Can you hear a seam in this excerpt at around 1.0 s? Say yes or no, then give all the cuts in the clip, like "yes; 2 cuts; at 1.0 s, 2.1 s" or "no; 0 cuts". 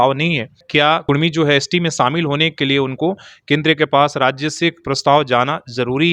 yes; 1 cut; at 1.0 s